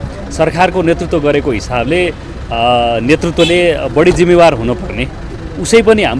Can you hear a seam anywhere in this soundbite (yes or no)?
no